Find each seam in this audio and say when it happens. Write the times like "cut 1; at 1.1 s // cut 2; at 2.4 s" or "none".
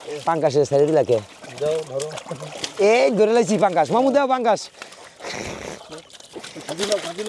none